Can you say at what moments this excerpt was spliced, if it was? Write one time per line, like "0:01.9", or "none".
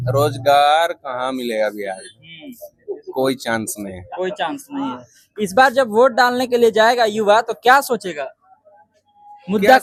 none